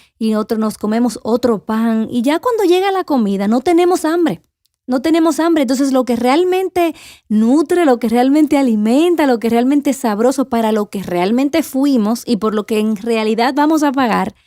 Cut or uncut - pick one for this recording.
uncut